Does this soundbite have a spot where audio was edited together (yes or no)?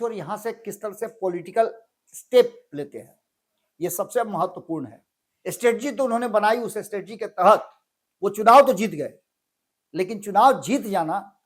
no